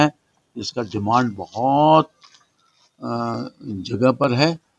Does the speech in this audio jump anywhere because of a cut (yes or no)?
no